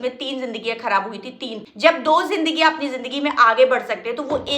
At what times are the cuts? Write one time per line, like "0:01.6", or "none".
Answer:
0:01.6